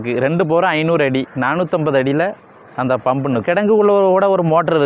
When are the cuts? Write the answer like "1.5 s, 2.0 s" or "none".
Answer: 3.4 s